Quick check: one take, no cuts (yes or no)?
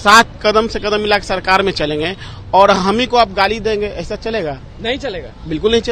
yes